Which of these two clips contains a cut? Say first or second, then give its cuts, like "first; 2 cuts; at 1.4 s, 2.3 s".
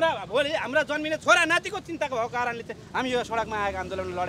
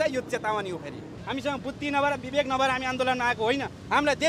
second; 1 cut; at 1.1 s